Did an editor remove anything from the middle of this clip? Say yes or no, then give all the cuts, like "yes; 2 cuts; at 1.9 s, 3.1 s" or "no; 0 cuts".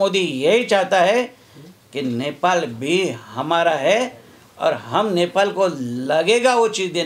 no; 0 cuts